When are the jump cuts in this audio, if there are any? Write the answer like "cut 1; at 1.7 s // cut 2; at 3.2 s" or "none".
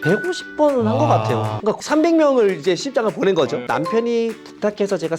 cut 1; at 1.5 s // cut 2; at 3.7 s